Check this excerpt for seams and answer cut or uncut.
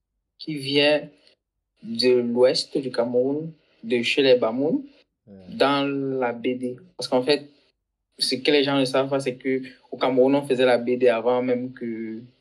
cut